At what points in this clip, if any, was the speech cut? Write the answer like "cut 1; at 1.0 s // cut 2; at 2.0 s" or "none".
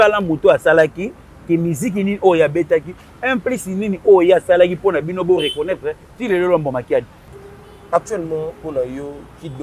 cut 1; at 7.2 s